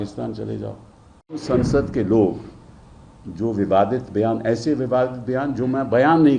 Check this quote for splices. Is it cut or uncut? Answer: cut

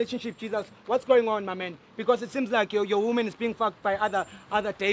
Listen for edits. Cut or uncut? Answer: uncut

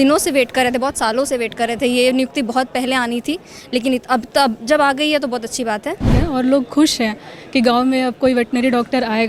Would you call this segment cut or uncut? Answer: cut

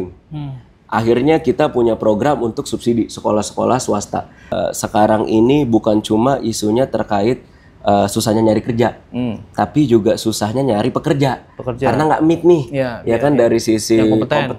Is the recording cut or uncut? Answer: cut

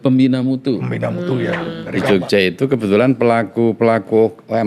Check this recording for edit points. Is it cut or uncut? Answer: cut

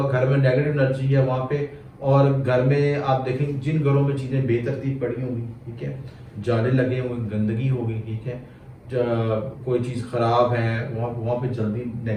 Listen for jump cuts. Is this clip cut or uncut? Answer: uncut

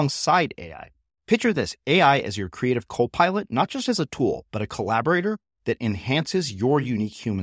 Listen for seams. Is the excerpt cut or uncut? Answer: uncut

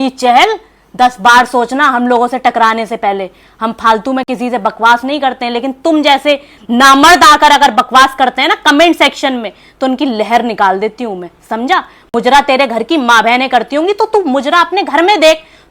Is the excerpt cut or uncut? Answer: uncut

